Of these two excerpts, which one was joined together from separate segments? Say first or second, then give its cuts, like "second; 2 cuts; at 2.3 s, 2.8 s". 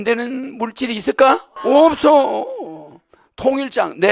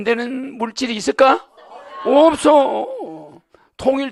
first; 1 cut; at 1.5 s